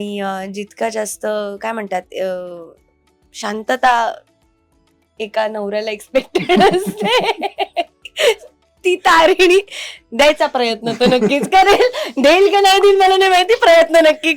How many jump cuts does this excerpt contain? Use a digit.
0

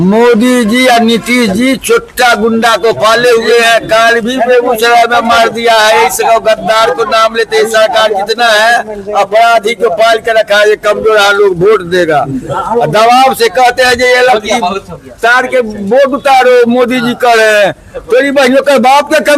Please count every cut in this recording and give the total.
0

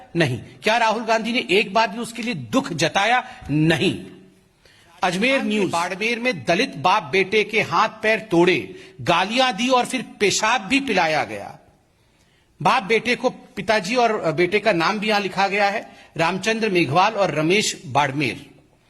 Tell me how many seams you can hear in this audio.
1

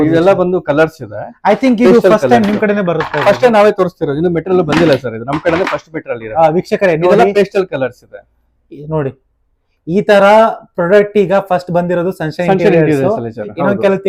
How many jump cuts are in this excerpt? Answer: 0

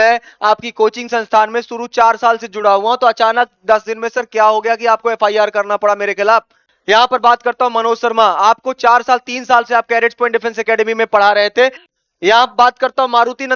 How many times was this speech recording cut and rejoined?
1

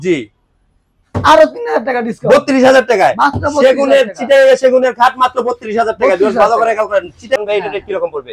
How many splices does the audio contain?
1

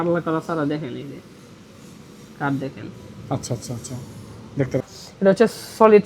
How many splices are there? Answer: 1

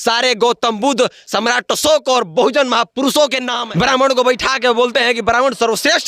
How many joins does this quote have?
1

